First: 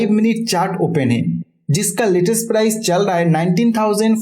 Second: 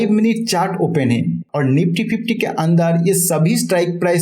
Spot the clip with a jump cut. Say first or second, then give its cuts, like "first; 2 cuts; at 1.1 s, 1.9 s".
second; 1 cut; at 1.5 s